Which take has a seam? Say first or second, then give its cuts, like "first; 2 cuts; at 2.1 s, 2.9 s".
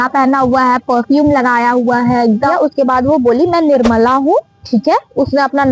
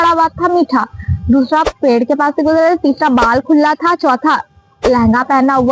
first; 1 cut; at 2.5 s